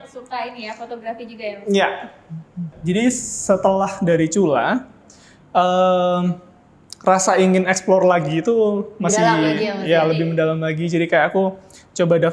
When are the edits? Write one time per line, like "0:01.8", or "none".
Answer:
0:02.7